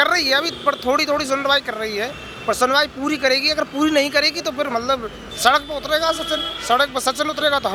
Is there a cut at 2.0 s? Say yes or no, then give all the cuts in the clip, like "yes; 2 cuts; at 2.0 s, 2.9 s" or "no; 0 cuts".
no; 0 cuts